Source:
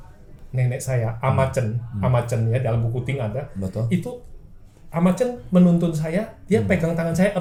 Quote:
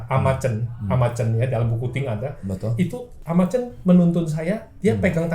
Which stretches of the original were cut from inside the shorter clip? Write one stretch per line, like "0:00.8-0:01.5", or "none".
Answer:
0:04.2-0:04.8

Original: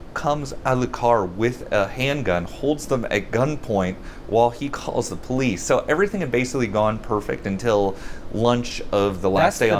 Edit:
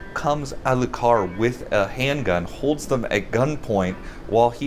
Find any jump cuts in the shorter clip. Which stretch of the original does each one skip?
none

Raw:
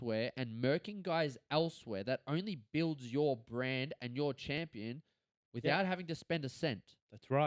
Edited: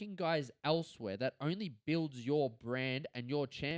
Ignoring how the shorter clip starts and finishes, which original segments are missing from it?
none

